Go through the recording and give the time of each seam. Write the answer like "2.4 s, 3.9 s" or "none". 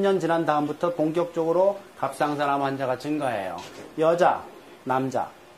4.6 s

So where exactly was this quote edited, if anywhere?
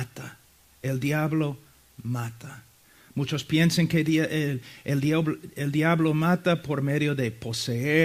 2.0 s

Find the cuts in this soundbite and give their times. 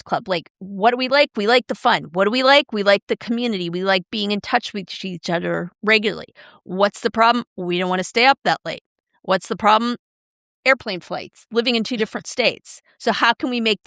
none

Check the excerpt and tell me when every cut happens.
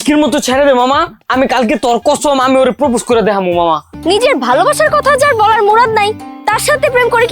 3.9 s

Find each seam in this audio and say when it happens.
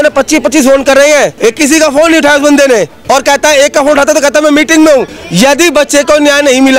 1.3 s, 3.0 s, 5.2 s

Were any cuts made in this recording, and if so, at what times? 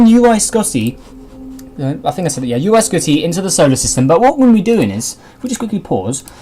5.0 s

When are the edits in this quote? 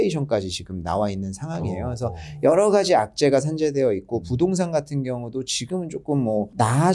none

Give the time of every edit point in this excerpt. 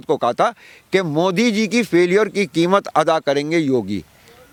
none

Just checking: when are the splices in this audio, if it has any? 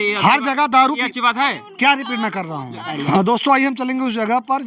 3.0 s

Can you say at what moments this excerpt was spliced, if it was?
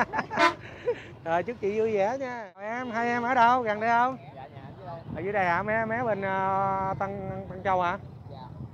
2.8 s

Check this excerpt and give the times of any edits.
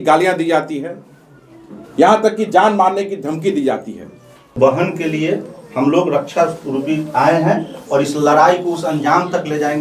4.5 s

